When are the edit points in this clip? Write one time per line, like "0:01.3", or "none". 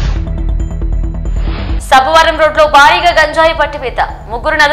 0:01.7